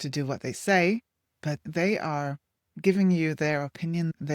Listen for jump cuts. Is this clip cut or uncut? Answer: uncut